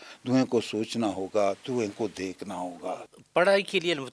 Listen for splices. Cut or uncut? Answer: cut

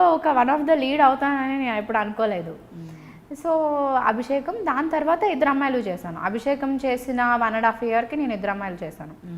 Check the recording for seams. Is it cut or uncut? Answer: uncut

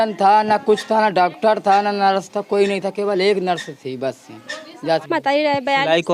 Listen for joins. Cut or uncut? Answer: cut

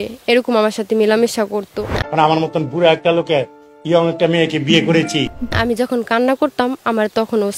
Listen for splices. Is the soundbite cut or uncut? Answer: cut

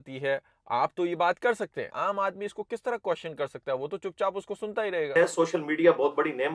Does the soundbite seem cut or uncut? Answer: cut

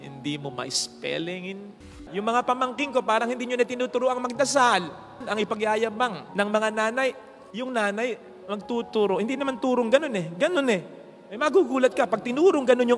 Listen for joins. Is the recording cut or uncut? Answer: cut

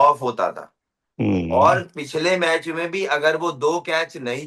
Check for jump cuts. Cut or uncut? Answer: uncut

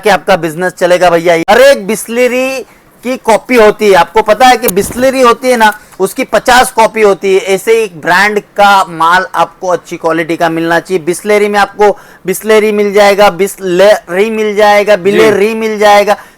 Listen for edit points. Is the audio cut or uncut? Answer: cut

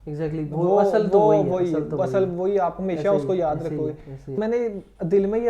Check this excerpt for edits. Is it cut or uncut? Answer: cut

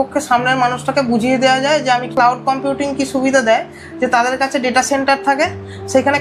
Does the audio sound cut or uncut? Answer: cut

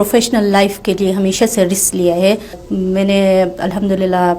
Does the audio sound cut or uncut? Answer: cut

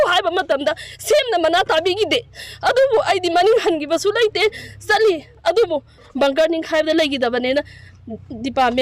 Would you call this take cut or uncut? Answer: cut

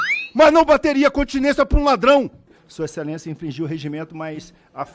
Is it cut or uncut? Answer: cut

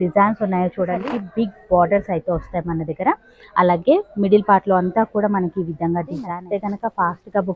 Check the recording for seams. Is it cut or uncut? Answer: cut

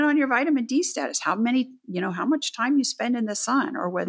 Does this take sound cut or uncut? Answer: uncut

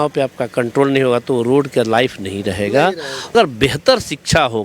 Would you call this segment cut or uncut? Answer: cut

